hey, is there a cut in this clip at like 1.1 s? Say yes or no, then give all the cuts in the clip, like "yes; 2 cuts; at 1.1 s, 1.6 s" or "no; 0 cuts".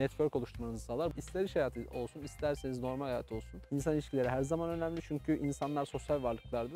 yes; 1 cut; at 1.1 s